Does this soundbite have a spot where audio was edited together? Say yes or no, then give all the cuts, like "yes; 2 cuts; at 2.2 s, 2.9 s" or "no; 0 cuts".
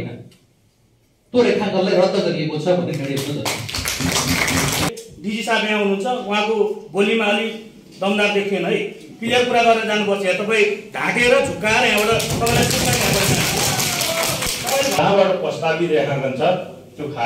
yes; 2 cuts; at 4.9 s, 15.0 s